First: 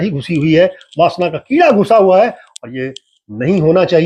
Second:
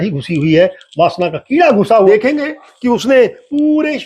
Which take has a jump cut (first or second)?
second